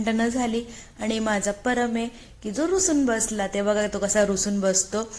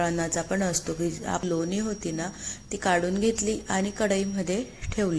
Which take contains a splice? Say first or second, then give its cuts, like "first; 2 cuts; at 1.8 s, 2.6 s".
second; 1 cut; at 1.4 s